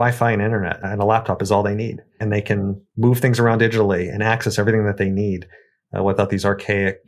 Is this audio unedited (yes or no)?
no